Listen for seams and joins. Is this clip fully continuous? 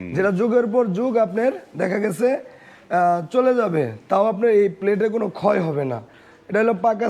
yes; 0 cuts

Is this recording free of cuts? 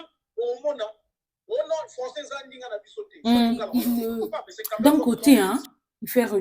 no; 1 cut; at 3.6 s

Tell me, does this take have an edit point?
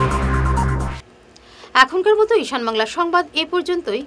no; 0 cuts

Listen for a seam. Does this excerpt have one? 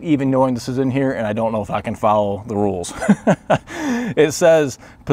no; 0 cuts

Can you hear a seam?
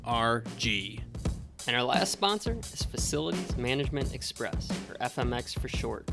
yes; 1 cut; at 1.0 s

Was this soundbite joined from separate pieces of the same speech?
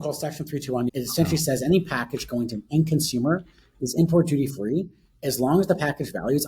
yes; 1 cut; at 0.9 s

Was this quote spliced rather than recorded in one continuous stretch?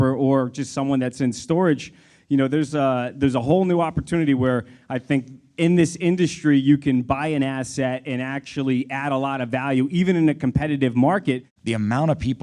yes; 1 cut; at 11.5 s

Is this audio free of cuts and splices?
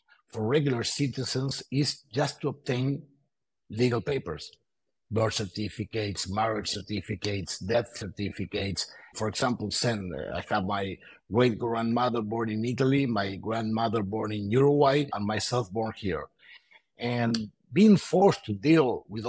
no; 2 cuts; at 9.1 s, 15.1 s

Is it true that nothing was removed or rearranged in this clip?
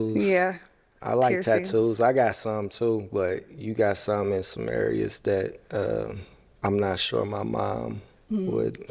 yes; 0 cuts

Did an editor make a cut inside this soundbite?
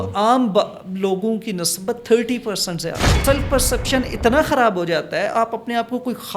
yes; 1 cut; at 3.2 s

